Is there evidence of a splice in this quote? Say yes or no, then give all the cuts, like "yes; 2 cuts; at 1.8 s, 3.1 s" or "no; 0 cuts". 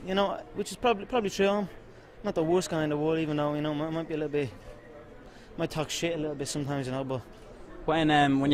no; 0 cuts